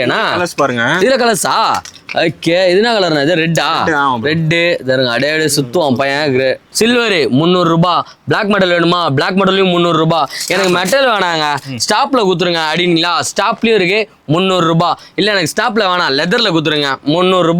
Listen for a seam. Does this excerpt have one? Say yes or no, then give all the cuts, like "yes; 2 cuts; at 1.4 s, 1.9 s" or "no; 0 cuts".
yes; 1 cut; at 6.6 s